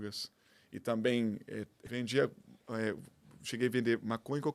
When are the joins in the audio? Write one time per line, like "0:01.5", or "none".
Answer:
0:01.9